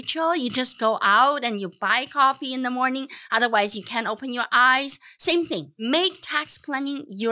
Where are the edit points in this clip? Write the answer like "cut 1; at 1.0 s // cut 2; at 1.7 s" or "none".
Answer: cut 1; at 5.8 s